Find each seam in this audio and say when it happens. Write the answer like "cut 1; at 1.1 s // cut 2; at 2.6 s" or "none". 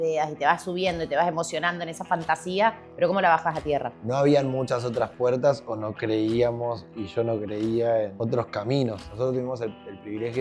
cut 1; at 4.0 s // cut 2; at 8.1 s // cut 3; at 9.1 s